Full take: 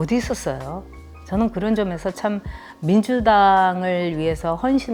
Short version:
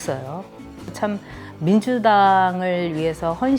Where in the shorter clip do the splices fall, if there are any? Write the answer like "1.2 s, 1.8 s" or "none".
0.9 s

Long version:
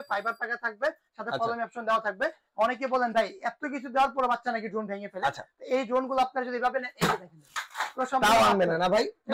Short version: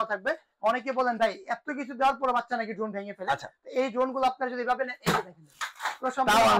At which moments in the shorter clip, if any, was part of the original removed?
none

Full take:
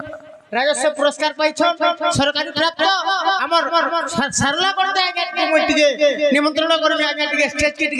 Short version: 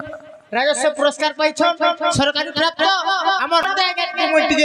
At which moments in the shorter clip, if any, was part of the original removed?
3.7 s

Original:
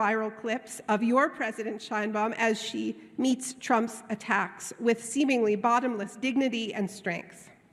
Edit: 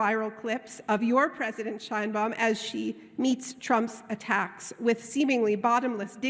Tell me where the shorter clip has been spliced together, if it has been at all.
none

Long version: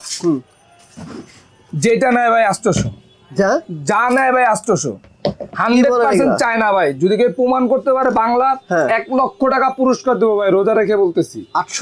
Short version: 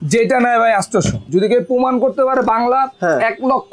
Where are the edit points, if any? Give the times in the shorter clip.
1.3 s

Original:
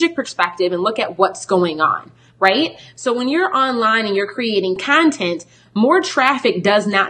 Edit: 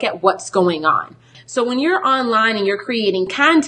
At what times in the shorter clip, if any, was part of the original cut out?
1.3 s

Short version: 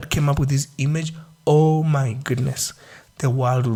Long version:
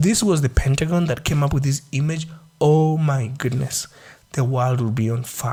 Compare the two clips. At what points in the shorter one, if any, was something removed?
none

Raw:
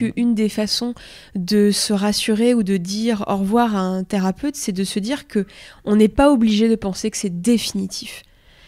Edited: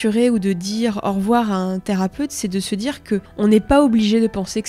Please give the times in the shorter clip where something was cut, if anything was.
3.3 s

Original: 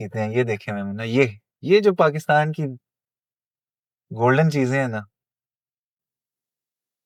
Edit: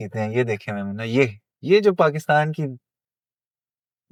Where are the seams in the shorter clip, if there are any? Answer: none

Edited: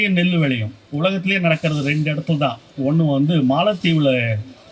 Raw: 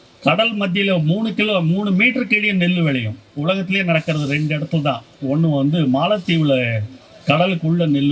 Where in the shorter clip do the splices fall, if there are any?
none

